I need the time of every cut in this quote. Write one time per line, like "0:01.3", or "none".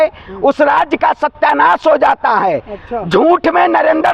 none